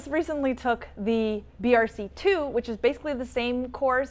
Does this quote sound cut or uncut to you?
cut